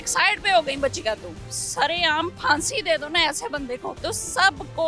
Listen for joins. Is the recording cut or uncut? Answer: cut